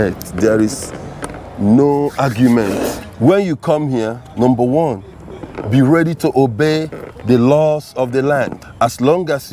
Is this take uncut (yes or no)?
no